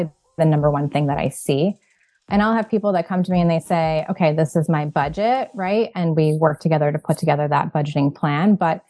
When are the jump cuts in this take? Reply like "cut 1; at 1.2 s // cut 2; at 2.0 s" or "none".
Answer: none